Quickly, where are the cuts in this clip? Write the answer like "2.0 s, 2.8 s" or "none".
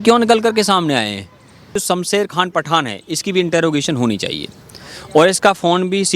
1.7 s